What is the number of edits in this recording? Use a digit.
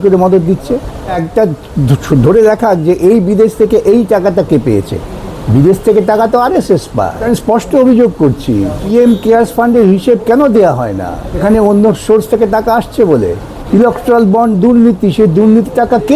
5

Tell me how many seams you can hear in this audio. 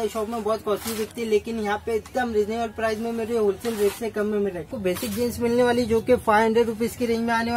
1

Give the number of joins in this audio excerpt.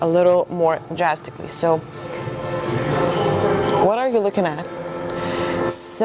0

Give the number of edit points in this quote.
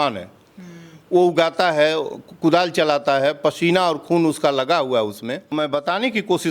1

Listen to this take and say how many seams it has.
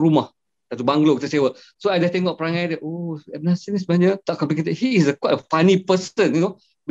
1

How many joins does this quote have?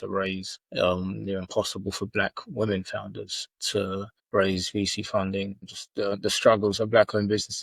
1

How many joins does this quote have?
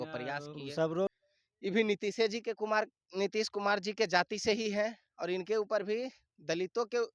1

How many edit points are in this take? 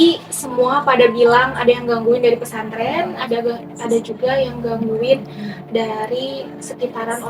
0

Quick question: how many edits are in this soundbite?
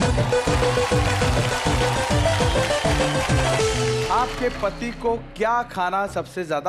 1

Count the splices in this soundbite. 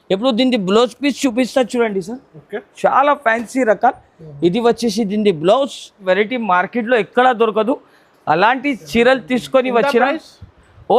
1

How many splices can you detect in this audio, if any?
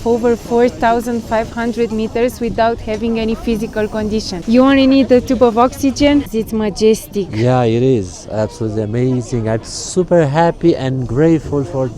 2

